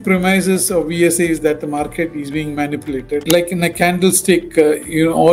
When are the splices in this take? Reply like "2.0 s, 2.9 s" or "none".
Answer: 3.2 s